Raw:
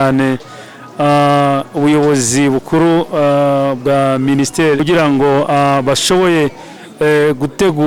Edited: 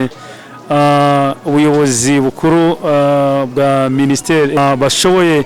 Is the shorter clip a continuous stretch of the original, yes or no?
no